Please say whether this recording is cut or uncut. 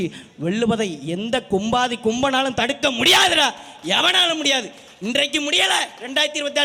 uncut